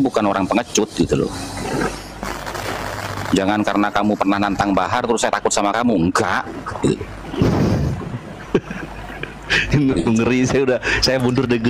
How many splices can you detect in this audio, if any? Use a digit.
0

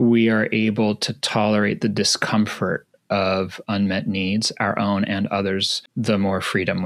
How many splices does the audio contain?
1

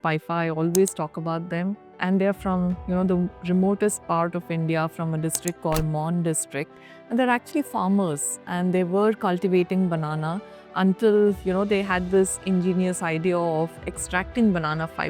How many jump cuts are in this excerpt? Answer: 1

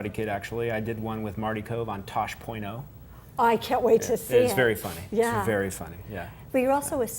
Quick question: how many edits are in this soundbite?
1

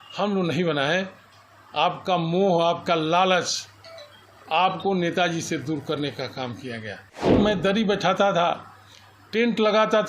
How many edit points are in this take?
1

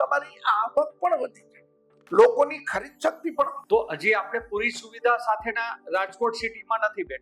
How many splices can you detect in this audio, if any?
1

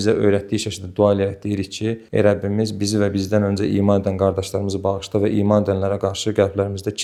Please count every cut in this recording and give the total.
0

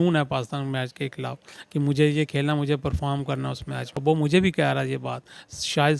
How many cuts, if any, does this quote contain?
1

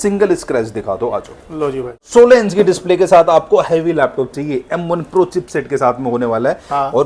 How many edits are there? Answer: 1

